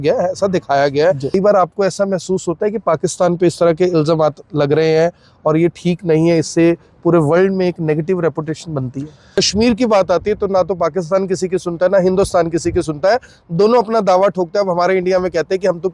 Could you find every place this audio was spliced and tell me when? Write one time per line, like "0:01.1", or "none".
0:01.3
0:09.2